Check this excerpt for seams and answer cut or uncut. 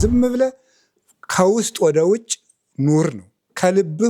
uncut